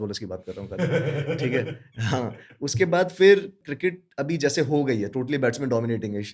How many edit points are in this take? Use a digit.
0